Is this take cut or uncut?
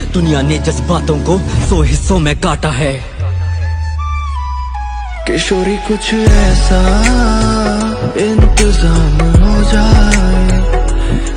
uncut